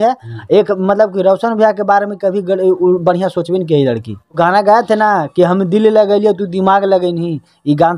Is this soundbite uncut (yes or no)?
no